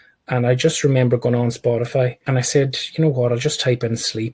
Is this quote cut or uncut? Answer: cut